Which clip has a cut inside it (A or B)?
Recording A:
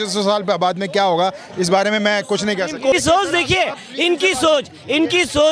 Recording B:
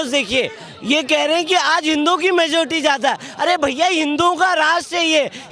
A